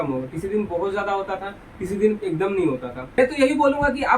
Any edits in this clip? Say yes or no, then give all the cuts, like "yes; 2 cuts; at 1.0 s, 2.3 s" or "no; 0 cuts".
yes; 1 cut; at 3.0 s